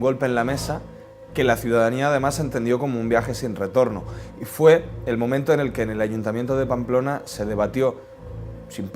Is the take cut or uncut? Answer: cut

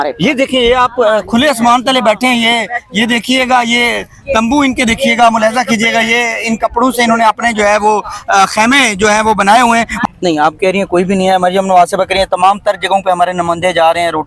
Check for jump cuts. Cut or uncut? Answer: cut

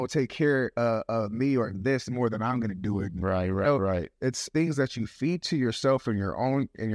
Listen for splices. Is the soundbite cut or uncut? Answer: cut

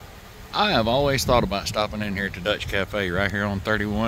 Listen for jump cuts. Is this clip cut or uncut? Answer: uncut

